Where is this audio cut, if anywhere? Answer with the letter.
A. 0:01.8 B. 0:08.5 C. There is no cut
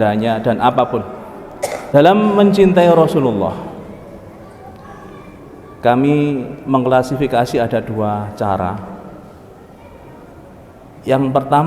A